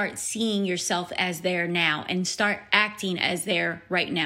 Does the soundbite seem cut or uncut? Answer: uncut